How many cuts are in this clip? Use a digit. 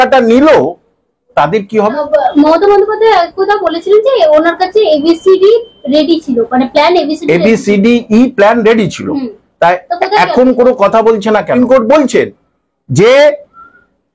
2